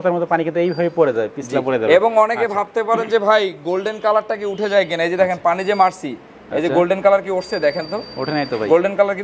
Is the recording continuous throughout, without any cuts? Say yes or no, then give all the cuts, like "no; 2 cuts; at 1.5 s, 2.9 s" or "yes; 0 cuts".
yes; 0 cuts